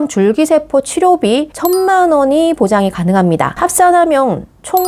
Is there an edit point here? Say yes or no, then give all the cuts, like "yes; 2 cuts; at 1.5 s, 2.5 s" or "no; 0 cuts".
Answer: no; 0 cuts